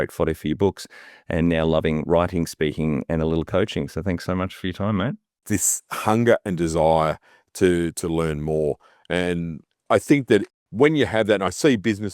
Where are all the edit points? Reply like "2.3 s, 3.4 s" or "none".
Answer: 5.4 s, 9.8 s, 10.6 s